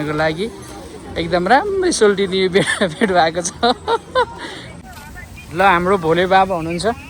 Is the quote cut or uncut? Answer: cut